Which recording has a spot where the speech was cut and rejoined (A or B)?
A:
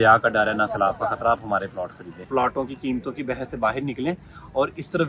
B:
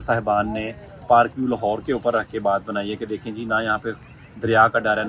A